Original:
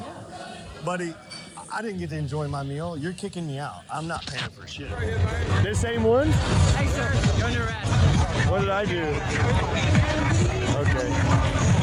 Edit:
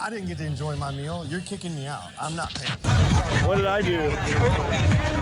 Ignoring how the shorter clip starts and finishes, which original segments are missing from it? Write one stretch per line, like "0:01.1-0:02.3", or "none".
0:04.5-0:07.8